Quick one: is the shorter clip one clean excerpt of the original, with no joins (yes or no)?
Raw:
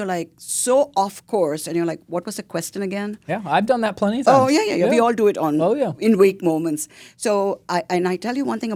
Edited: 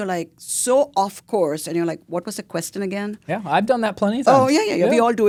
yes